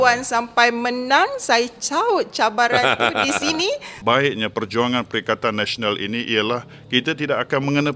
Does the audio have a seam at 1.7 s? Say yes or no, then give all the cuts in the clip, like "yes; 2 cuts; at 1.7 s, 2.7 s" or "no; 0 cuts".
no; 1 cut; at 3.9 s